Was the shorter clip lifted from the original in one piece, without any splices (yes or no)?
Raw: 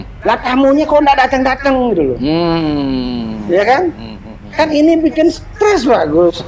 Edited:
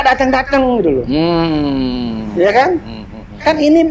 yes